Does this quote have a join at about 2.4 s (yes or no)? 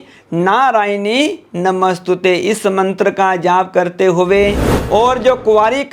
no